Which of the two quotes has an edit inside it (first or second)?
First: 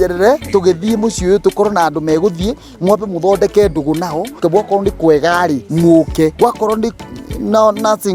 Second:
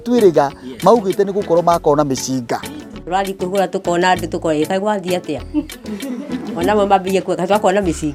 first